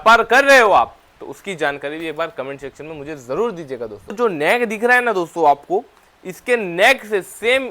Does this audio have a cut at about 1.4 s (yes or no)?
no